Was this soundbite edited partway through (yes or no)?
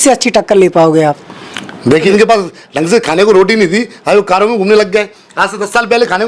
yes